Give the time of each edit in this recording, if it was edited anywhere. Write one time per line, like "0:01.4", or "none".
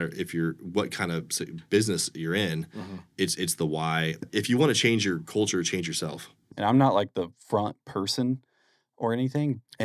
0:04.2
0:06.4